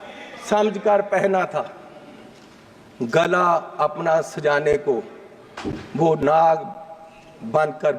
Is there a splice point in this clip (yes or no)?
no